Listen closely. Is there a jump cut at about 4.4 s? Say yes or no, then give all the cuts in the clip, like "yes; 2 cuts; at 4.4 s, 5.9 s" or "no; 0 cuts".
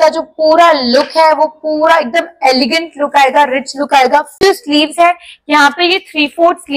yes; 1 cut; at 4.4 s